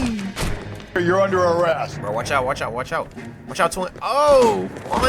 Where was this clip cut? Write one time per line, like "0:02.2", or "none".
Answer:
0:00.9